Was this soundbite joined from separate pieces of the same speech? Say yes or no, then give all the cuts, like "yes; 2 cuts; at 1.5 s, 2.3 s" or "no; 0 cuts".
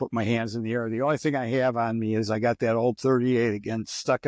no; 0 cuts